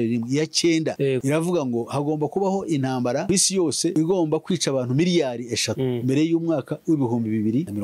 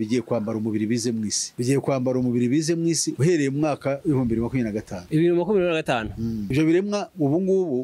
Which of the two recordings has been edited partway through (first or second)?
second